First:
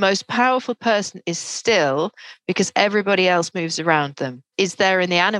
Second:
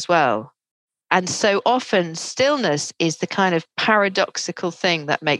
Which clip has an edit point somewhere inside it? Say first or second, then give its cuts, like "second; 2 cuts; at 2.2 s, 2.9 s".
first; 1 cut; at 4.5 s